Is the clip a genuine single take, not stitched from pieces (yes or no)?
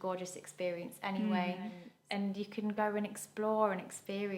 no